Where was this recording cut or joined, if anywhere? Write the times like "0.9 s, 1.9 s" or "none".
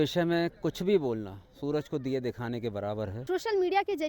3.2 s